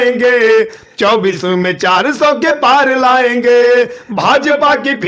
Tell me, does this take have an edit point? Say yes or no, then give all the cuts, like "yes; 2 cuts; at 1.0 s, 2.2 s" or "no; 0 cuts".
no; 0 cuts